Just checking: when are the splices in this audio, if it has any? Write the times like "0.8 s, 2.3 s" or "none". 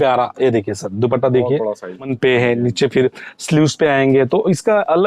2.1 s